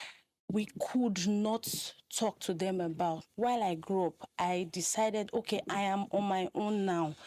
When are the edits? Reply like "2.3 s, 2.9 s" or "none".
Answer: 3.3 s